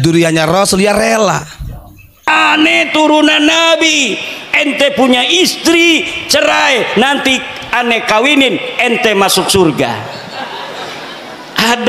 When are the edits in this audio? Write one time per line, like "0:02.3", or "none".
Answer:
0:02.3